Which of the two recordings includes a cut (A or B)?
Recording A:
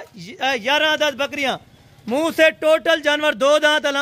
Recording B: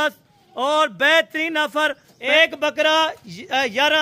B